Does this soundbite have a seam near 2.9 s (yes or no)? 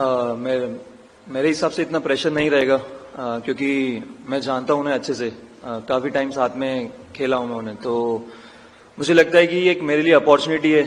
no